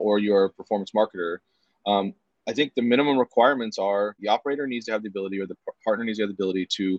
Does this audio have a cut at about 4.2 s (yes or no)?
yes